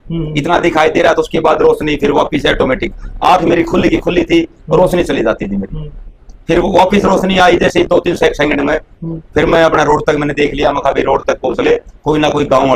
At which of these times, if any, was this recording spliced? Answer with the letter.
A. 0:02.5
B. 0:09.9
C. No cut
C